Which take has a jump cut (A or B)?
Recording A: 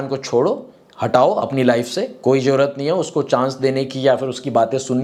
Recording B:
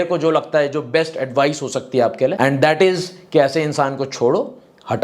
B